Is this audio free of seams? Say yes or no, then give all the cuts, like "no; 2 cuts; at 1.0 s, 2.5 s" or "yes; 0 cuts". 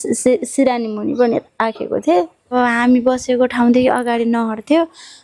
no; 1 cut; at 2.5 s